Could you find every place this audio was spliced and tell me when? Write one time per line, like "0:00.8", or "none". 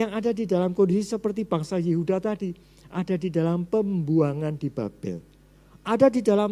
none